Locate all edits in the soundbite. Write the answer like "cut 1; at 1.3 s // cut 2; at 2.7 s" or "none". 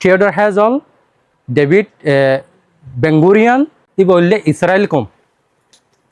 cut 1; at 3.8 s